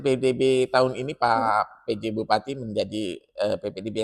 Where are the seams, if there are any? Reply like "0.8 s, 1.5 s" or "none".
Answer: none